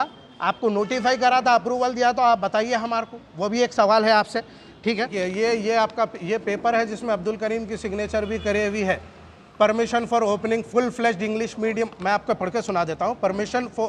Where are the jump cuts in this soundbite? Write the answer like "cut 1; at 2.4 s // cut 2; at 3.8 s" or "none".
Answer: cut 1; at 5.1 s